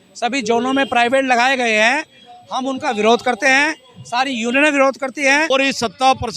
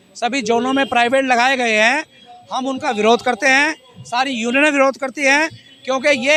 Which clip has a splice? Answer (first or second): first